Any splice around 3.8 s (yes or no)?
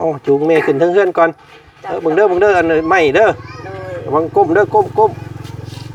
no